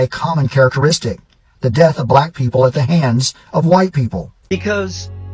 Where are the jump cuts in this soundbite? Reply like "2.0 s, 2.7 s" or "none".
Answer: 4.3 s